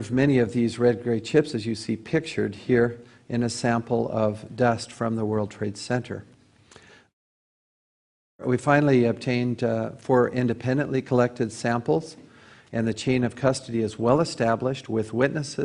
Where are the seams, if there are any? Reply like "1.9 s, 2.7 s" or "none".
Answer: 13.9 s